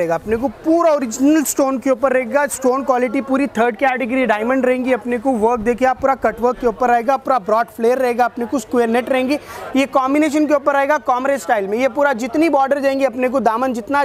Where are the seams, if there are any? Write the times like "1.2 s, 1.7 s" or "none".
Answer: none